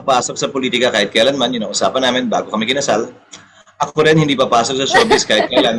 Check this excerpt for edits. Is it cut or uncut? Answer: uncut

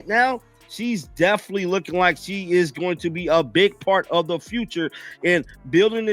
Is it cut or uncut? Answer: uncut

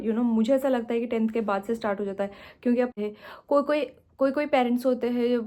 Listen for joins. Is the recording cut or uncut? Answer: cut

